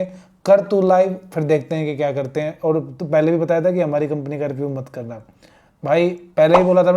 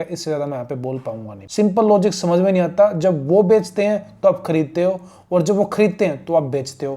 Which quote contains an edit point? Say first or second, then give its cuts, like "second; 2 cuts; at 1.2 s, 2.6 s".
second; 1 cut; at 1.4 s